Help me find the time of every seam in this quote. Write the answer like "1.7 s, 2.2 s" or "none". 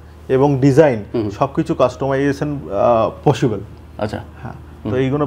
none